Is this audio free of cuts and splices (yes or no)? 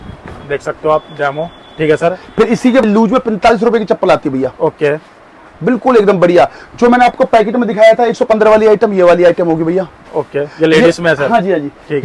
no